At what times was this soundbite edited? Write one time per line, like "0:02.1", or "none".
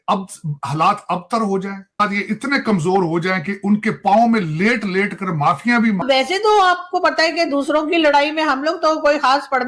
0:02.0
0:06.0